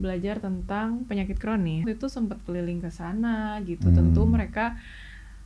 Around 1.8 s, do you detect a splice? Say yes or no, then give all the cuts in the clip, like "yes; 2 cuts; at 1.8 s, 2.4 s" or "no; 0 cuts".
yes; 1 cut; at 1.8 s